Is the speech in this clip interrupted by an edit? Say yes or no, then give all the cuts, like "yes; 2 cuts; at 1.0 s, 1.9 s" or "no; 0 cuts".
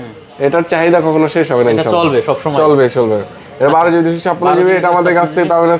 no; 0 cuts